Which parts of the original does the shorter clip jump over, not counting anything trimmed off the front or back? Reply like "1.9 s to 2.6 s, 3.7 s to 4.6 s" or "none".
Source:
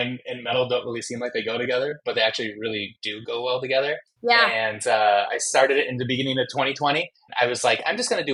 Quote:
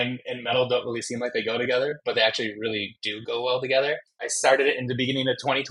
4.2 s to 5.3 s